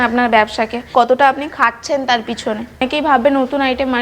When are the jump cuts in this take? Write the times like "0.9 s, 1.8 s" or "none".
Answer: 0.9 s, 2.8 s